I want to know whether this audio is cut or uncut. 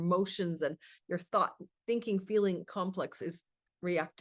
uncut